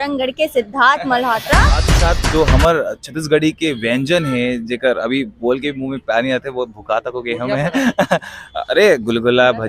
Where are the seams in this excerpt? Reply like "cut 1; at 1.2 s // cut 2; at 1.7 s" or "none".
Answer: cut 1; at 1.9 s